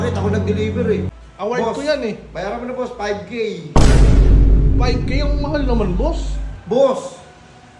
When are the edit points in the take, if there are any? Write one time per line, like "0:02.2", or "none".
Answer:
0:01.1